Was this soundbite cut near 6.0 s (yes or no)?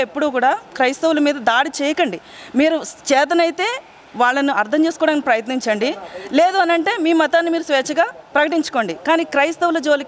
no